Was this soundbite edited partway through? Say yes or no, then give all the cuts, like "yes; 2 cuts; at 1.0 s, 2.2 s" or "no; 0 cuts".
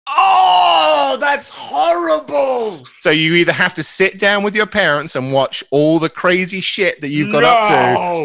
yes; 1 cut; at 2.9 s